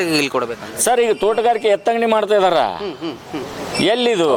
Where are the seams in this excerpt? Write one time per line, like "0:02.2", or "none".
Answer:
none